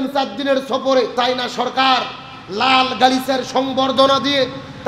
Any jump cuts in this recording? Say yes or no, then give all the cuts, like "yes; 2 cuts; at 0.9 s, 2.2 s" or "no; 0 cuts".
yes; 1 cut; at 1.1 s